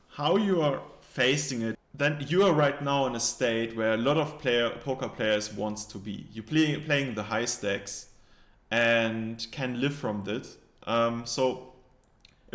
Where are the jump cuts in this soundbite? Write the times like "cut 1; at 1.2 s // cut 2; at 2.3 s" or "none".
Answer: cut 1; at 1.8 s